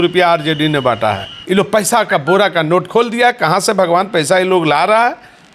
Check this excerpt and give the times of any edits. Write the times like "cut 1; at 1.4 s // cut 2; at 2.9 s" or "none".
cut 1; at 1.3 s